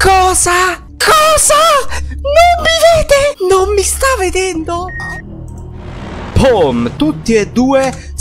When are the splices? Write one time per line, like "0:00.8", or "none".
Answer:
0:04.9

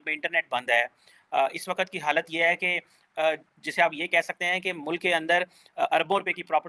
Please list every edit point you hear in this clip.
none

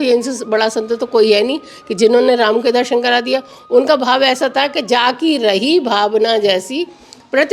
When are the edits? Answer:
none

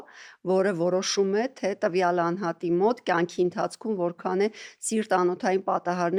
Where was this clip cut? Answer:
none

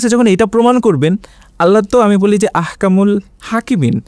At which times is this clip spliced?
none

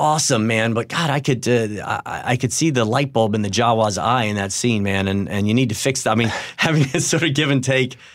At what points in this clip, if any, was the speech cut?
none

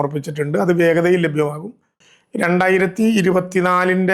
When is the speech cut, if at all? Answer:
0:01.9

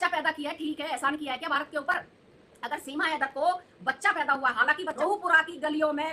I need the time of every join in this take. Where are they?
0:04.9

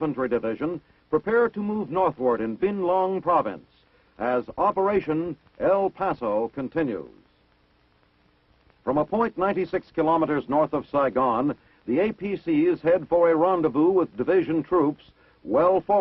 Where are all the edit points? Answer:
0:12.8

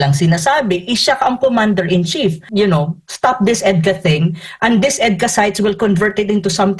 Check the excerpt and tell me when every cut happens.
0:02.4

